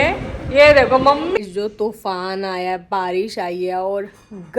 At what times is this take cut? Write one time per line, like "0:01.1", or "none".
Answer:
0:01.4